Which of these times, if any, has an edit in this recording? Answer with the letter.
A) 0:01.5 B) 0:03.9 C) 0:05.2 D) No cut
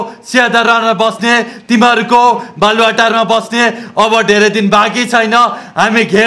D